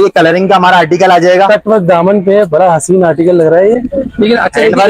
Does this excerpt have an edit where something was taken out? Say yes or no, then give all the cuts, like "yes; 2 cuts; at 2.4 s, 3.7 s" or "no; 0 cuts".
no; 0 cuts